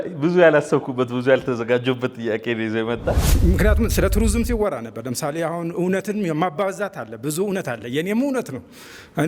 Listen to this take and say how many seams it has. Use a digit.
1